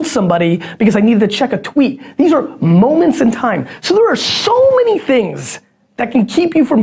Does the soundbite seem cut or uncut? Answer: uncut